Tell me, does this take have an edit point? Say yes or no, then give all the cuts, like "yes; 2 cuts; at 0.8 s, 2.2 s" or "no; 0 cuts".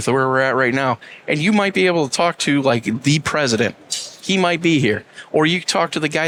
no; 0 cuts